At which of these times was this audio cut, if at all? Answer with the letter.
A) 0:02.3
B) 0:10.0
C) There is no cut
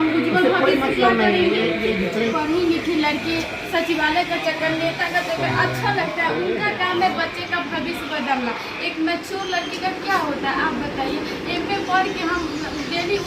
A